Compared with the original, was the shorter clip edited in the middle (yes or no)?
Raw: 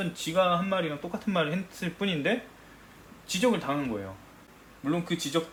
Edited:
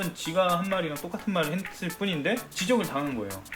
yes